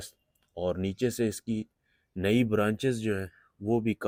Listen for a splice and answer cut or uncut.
uncut